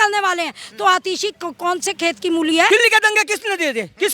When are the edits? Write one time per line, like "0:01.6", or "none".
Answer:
0:02.7